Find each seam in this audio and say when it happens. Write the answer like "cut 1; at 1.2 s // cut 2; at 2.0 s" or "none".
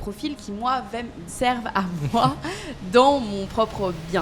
cut 1; at 1.2 s